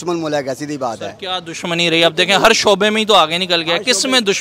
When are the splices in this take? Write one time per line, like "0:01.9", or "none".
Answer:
none